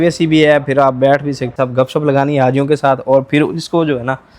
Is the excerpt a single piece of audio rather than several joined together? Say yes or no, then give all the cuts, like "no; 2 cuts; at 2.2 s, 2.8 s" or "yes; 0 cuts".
no; 1 cut; at 1.5 s